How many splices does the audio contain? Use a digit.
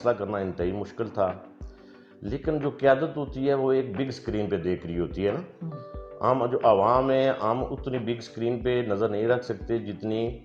0